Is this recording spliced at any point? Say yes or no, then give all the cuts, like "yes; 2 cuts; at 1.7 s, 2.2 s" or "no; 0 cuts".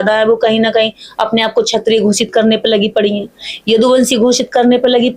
no; 0 cuts